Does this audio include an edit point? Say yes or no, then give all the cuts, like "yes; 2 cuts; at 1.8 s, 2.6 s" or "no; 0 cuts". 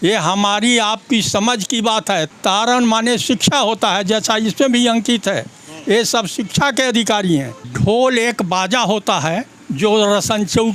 yes; 2 cuts; at 2.3 s, 7.6 s